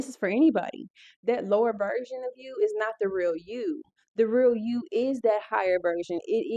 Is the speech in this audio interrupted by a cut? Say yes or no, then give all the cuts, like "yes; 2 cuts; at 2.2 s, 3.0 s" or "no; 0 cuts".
no; 0 cuts